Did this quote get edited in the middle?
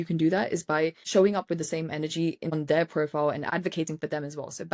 yes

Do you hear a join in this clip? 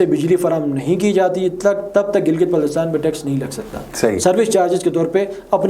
no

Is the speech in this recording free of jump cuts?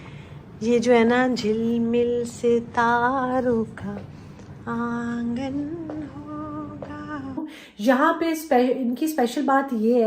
no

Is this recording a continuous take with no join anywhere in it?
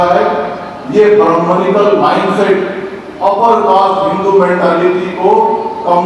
yes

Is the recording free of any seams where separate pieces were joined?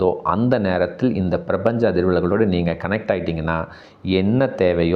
yes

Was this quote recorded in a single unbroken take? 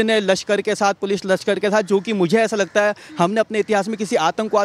yes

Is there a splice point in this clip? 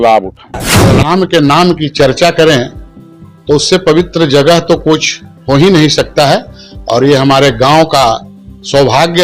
yes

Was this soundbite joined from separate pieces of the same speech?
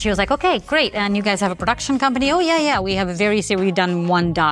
no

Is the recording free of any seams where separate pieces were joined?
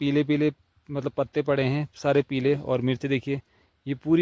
yes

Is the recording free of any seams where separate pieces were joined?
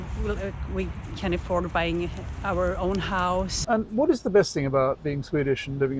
no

